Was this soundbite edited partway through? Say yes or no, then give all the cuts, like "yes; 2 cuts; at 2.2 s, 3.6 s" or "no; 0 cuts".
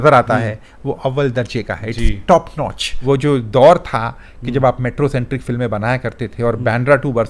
yes; 1 cut; at 2.9 s